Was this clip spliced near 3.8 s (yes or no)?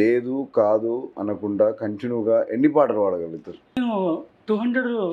yes